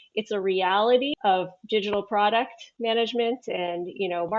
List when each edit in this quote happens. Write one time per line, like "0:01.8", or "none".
0:01.1